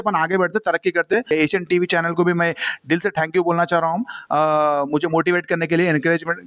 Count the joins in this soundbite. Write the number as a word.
one